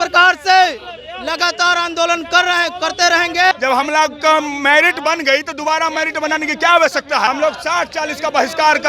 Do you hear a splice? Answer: yes; 2 cuts; at 3.5 s, 7.3 s

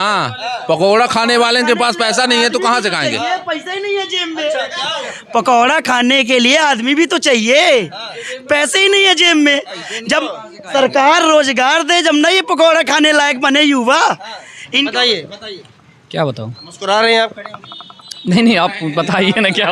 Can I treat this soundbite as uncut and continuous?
yes; 0 cuts

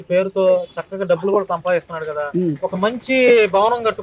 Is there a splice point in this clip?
no; 0 cuts

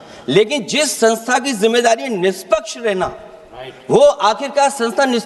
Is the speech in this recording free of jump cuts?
yes; 0 cuts

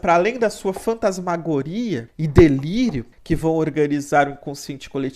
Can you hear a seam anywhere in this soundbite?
yes; 2 cuts; at 2.1 s, 3.1 s

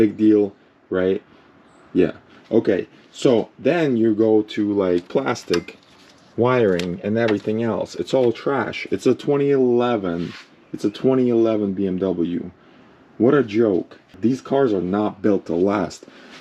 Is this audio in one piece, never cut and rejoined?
no; 1 cut; at 14.0 s

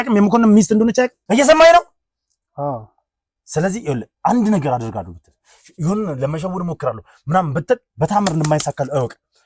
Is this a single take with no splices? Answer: no; 1 cut; at 1.2 s

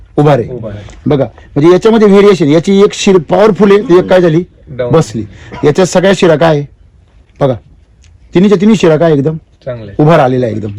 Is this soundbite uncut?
yes; 0 cuts

